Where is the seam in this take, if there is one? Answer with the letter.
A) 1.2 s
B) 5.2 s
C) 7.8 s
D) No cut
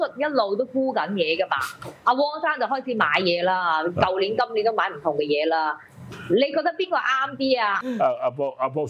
C